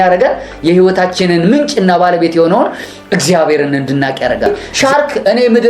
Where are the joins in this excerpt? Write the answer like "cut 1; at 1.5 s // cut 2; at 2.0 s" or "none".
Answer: cut 1; at 4.5 s